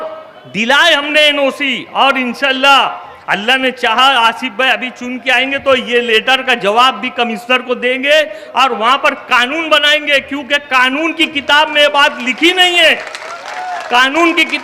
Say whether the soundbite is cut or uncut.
uncut